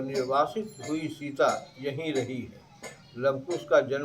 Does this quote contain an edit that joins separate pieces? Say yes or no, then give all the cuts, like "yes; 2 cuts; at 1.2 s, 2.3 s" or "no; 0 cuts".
no; 0 cuts